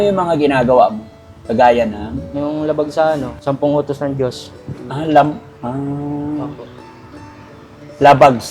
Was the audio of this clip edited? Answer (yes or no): yes